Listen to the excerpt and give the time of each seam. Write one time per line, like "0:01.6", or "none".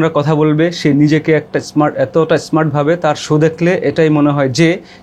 none